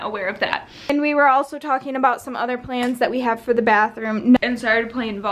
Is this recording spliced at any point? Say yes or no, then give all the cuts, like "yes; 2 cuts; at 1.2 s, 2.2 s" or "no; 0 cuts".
yes; 2 cuts; at 0.9 s, 4.4 s